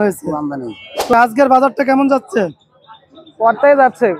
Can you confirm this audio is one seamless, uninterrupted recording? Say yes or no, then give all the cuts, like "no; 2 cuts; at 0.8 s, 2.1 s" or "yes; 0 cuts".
no; 1 cut; at 1.1 s